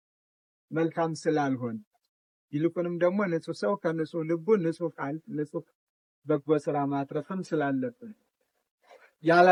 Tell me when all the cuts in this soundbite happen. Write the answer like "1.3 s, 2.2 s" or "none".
none